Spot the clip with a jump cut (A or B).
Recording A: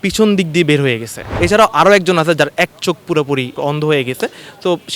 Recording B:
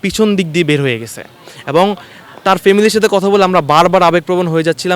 A